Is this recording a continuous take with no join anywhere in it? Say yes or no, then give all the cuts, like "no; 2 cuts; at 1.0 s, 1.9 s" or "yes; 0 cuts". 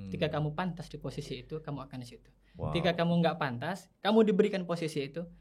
yes; 0 cuts